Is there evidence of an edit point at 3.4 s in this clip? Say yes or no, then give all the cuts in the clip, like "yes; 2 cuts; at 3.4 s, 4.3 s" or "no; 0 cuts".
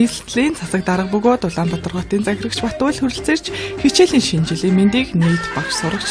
no; 1 cut; at 1.0 s